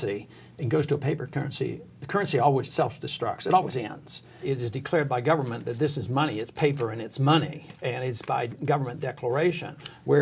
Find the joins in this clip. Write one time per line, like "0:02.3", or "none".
0:02.7
0:04.4